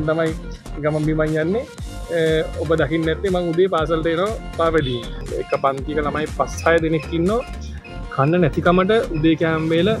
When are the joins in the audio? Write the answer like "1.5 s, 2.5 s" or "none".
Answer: 5.2 s

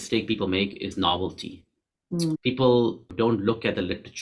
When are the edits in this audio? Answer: 3.0 s

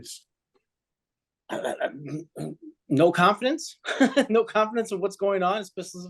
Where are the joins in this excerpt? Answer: none

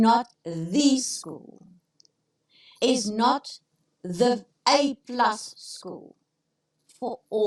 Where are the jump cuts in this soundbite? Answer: none

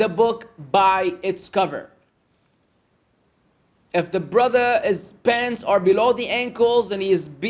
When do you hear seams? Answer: none

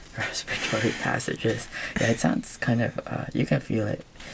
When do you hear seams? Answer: none

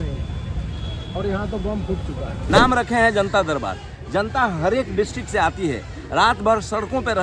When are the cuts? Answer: 2.4 s

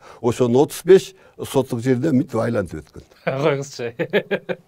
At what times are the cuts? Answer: none

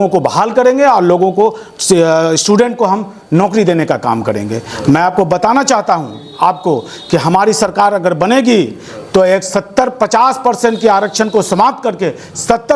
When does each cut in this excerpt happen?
none

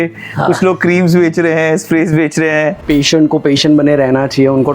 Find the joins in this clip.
2.8 s

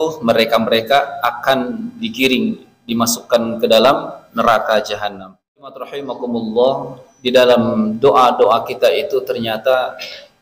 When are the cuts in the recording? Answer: 6.0 s

